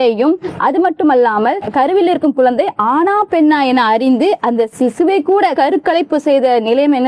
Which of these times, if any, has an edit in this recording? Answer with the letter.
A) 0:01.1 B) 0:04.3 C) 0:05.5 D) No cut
C